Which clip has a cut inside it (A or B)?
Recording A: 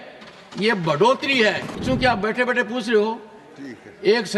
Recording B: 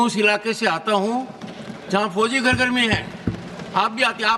A